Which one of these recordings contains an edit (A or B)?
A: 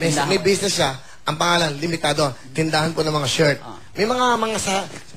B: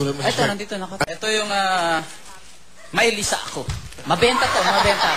B